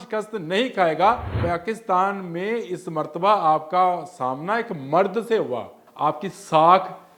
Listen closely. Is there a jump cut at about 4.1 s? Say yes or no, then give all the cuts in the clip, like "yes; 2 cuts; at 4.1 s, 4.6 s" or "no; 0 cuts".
no; 2 cuts; at 1.3 s, 5.8 s